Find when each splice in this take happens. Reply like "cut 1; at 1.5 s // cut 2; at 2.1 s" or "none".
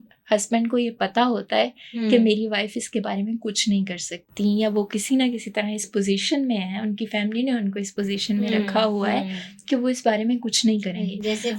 none